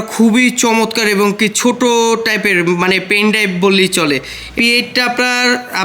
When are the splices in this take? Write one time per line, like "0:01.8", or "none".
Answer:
0:04.4